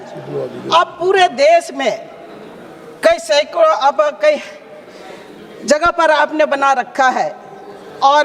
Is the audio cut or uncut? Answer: uncut